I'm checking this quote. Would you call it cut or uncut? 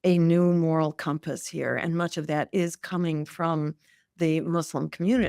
uncut